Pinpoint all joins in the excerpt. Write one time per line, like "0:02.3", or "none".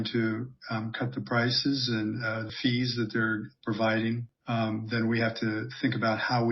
0:02.5
0:04.3